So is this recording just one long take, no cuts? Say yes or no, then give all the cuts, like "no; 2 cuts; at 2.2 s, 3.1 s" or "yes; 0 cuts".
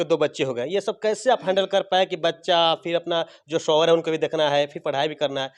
yes; 0 cuts